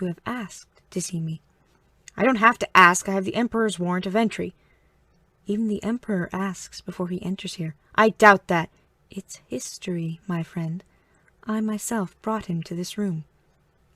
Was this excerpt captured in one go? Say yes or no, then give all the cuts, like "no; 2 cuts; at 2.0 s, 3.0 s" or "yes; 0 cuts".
yes; 0 cuts